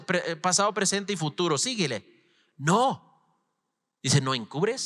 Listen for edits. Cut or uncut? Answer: uncut